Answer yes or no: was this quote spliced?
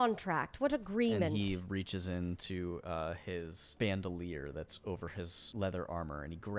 yes